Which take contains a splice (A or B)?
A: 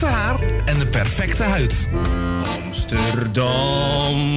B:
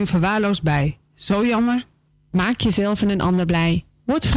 A